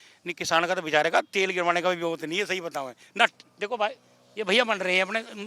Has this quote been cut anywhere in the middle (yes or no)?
no